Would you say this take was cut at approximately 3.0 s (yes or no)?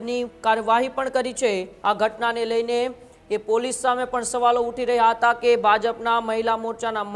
no